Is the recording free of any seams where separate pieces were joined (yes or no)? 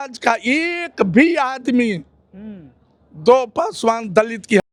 yes